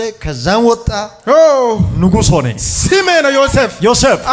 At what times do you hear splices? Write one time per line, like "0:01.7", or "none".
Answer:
none